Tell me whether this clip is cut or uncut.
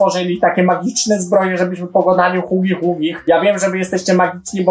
uncut